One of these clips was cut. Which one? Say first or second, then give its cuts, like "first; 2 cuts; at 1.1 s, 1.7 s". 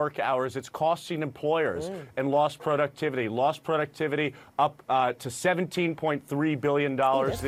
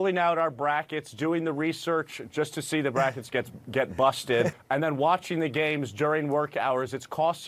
second; 1 cut; at 4.5 s